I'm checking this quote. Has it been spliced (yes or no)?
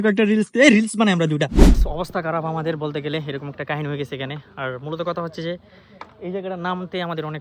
yes